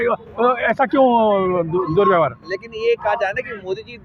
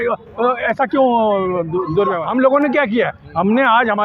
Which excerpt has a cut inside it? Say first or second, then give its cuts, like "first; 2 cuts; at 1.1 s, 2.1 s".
second; 1 cut; at 2.2 s